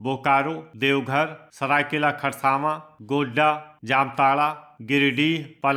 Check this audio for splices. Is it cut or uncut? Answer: uncut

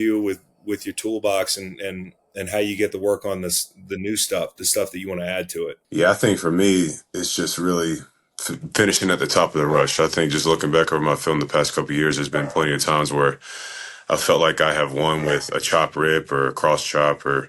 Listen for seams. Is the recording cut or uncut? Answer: cut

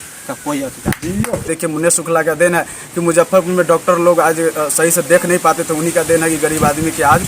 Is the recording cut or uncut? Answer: cut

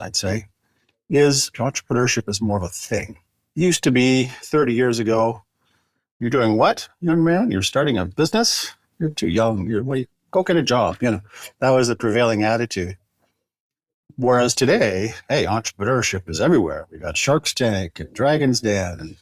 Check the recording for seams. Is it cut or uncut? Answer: cut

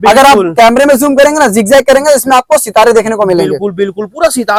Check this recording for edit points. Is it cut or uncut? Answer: uncut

